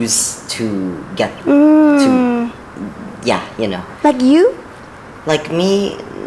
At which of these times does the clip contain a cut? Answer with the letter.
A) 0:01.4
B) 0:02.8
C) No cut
C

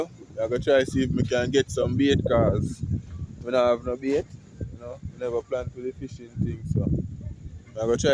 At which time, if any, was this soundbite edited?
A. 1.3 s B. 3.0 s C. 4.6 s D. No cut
D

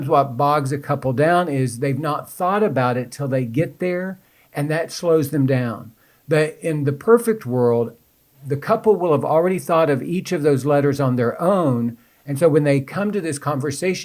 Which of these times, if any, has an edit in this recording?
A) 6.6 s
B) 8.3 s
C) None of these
C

